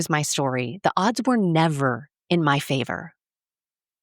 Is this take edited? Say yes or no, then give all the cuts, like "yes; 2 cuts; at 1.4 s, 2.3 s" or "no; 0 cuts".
no; 0 cuts